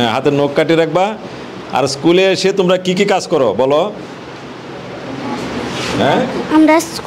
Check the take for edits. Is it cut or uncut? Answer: uncut